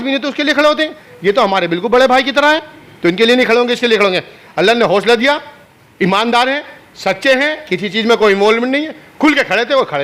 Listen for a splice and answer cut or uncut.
uncut